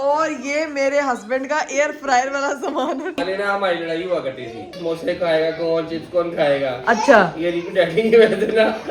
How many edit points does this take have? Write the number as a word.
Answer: two